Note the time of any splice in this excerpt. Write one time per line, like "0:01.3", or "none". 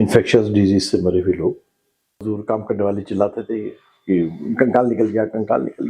0:02.2